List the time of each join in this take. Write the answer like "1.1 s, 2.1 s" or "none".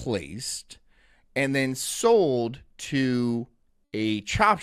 none